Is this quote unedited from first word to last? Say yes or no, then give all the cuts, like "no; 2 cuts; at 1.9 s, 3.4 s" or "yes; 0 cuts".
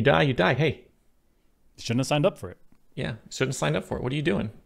yes; 0 cuts